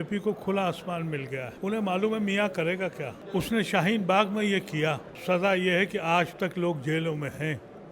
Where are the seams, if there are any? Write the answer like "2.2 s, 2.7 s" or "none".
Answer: 1.5 s, 3.1 s, 5.1 s